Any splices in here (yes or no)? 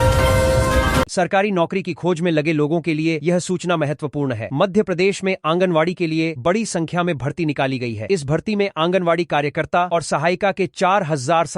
yes